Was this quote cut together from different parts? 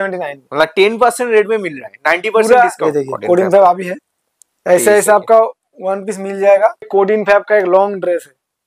yes; 2 cuts; at 2.8 s, 6.9 s

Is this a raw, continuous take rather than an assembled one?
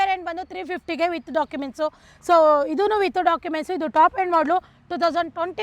yes; 0 cuts

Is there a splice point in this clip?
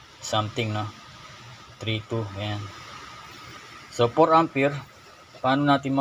no; 0 cuts

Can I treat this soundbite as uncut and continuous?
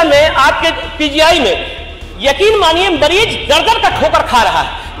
yes; 0 cuts

